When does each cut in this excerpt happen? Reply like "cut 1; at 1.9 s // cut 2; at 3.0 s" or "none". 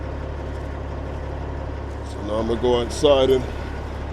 cut 1; at 2.1 s

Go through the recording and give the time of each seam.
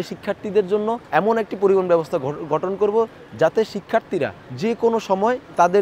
cut 1; at 1.0 s // cut 2; at 4.4 s

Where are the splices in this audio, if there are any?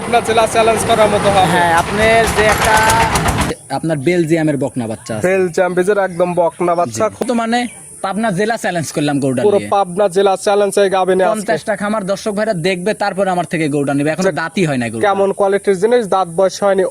cut 1; at 3.4 s // cut 2; at 7.2 s

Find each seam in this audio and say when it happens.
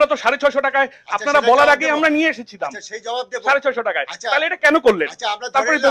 none

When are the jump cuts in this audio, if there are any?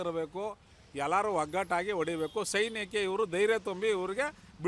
none

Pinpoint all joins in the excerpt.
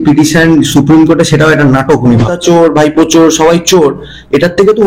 cut 1; at 2.3 s

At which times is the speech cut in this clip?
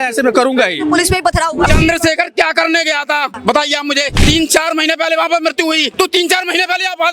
cut 1; at 1.7 s // cut 2; at 3.4 s // cut 3; at 4.1 s // cut 4; at 5.9 s

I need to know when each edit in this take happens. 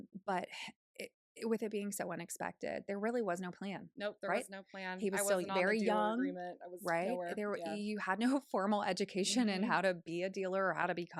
none

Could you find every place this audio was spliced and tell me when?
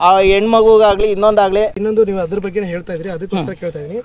cut 1; at 1.8 s

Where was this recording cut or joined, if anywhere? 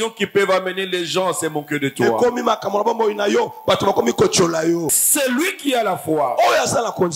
cut 1; at 5.0 s

